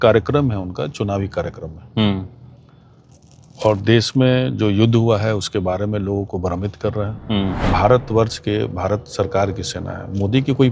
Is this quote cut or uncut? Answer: cut